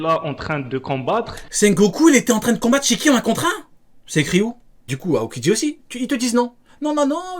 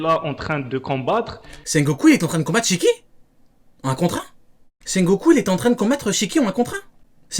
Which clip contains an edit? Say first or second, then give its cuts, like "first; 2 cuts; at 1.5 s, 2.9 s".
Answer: first; 2 cuts; at 1.4 s, 4.9 s